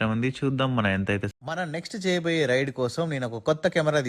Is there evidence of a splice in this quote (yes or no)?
yes